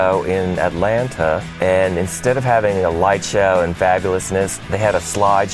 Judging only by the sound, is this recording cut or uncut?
cut